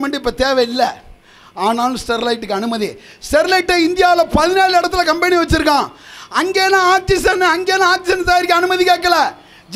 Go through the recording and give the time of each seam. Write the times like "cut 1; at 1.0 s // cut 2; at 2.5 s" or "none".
none